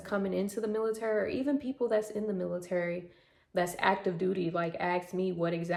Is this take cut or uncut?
uncut